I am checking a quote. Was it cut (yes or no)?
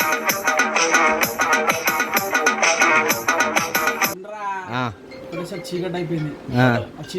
no